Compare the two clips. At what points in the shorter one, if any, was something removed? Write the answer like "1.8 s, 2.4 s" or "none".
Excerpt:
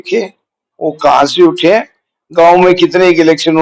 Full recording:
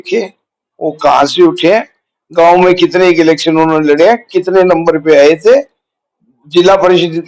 none